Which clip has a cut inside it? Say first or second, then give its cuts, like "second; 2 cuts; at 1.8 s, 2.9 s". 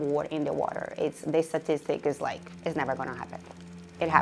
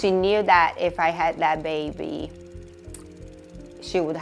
first; 1 cut; at 2.5 s